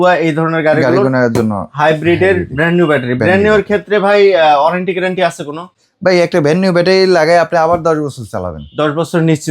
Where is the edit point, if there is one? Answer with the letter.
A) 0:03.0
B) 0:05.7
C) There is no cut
C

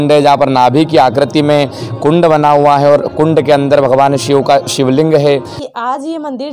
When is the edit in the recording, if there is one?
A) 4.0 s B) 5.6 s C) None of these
B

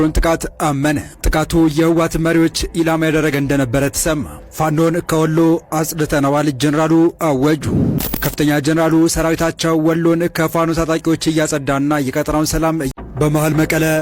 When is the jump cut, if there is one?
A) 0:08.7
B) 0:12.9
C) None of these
B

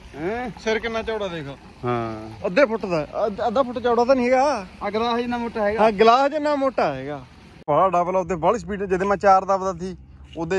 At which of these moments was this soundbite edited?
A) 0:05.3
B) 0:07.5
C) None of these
B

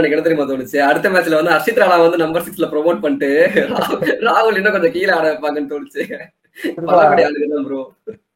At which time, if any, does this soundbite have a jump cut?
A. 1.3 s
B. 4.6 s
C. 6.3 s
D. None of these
D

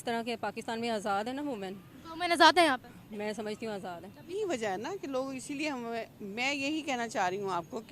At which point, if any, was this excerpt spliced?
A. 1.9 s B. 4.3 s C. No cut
B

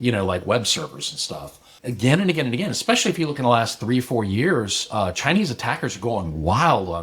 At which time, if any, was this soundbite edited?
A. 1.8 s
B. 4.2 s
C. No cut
A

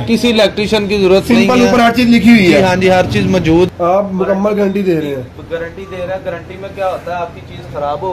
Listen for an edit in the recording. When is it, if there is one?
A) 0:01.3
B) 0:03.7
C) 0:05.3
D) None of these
B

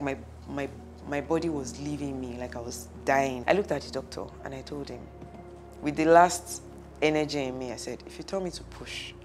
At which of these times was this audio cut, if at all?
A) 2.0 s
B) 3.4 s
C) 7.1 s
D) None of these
B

